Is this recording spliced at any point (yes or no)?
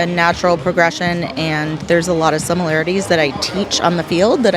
no